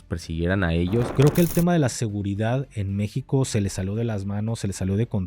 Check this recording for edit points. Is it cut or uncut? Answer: cut